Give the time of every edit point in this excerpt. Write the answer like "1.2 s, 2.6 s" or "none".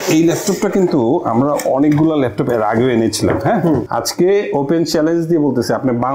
3.9 s